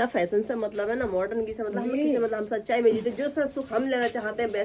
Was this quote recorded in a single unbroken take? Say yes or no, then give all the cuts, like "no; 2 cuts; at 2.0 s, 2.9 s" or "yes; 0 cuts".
yes; 0 cuts